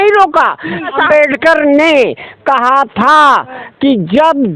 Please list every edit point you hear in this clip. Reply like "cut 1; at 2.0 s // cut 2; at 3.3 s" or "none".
cut 1; at 1.0 s